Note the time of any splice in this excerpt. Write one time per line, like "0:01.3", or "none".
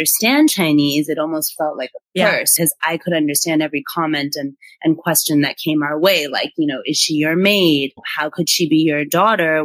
0:02.5
0:08.0